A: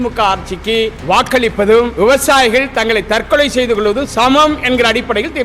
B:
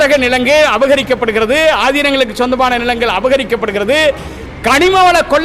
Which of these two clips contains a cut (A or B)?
A